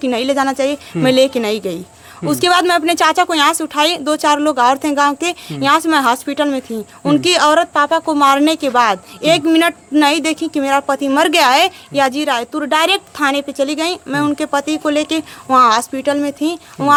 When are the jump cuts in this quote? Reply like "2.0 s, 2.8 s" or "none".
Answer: none